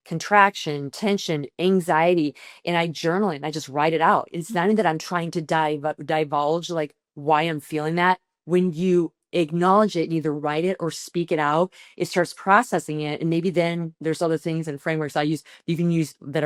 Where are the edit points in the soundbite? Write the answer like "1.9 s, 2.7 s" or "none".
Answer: none